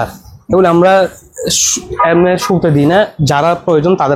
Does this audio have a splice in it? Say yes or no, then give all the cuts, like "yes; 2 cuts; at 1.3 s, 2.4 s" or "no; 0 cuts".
no; 0 cuts